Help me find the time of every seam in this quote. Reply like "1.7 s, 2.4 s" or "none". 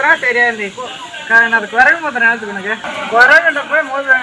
2.8 s